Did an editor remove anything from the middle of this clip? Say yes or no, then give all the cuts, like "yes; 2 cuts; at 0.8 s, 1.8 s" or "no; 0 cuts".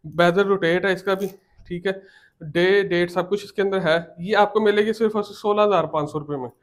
no; 0 cuts